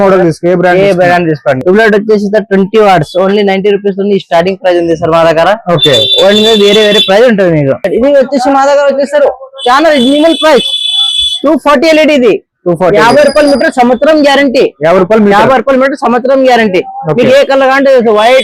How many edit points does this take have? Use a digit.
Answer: 2